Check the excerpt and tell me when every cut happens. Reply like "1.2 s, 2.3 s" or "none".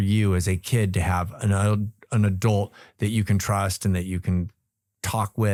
none